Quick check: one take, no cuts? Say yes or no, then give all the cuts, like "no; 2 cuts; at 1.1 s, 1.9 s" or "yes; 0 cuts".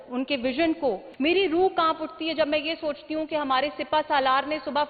no; 1 cut; at 1.1 s